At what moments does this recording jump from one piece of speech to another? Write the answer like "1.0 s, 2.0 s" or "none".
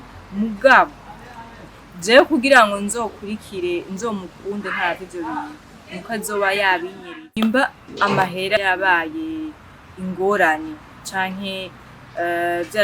7.4 s, 8.6 s